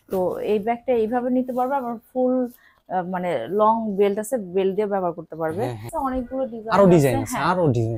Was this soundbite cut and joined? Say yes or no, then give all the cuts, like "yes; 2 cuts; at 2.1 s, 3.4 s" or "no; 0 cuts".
yes; 1 cut; at 5.9 s